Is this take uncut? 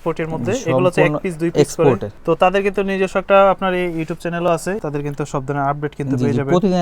no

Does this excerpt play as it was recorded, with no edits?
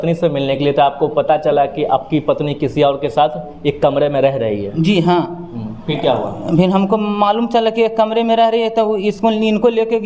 yes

